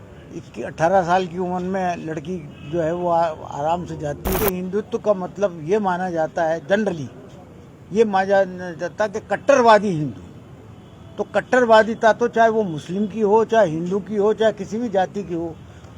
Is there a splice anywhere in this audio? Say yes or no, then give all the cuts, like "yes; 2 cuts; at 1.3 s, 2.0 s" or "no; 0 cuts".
yes; 1 cut; at 4.4 s